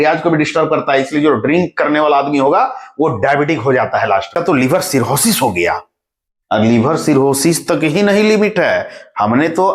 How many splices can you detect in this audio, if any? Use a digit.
1